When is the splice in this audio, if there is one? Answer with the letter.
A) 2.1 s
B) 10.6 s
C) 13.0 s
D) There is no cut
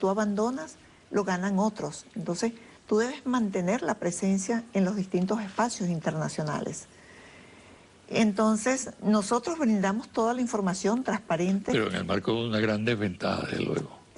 C